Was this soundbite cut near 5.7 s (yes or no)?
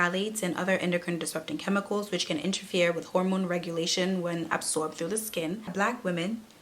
yes